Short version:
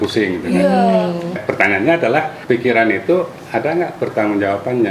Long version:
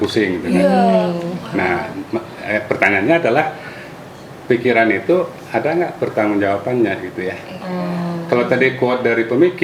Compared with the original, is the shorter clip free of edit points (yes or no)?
no